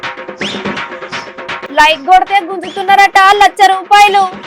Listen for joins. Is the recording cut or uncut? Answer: cut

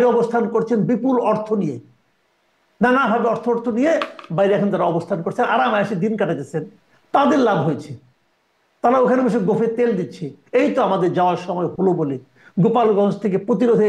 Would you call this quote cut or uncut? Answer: uncut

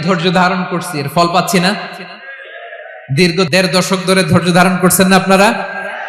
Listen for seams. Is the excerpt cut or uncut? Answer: uncut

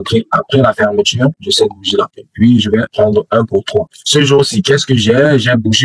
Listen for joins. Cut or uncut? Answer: uncut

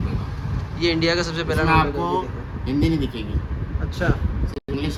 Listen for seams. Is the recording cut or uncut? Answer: uncut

